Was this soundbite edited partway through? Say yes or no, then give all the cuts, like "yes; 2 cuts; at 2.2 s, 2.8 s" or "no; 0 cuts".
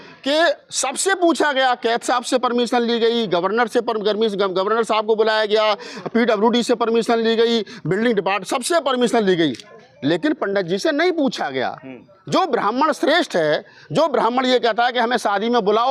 no; 0 cuts